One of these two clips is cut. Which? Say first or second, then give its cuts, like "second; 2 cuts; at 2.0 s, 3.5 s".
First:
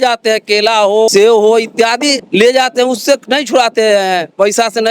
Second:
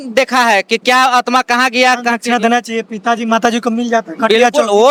first; 2 cuts; at 1.1 s, 2.2 s